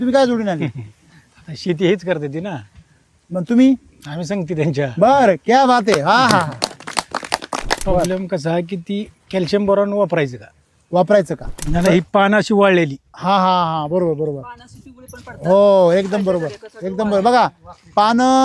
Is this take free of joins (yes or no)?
no